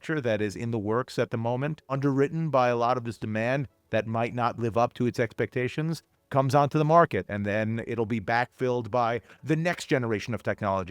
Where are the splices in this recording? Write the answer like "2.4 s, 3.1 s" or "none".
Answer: 1.9 s

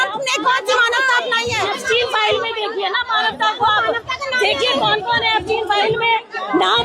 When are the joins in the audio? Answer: 1.7 s

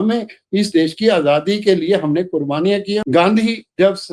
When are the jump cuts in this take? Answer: 3.0 s

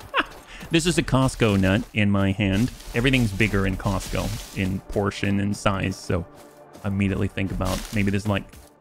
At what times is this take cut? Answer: 2.8 s

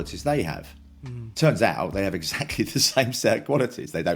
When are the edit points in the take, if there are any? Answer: none

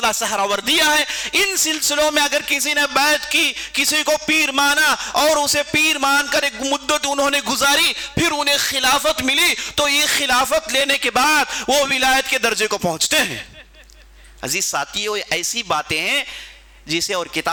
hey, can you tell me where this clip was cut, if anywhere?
none

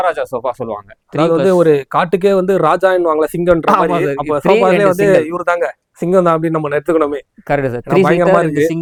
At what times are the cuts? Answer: none

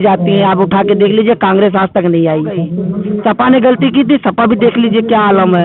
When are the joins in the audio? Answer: 2.8 s

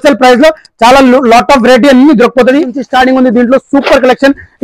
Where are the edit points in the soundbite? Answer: 2.8 s

